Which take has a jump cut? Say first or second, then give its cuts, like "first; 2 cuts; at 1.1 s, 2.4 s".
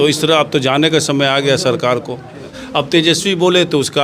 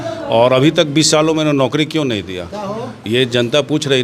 first; 1 cut; at 2.6 s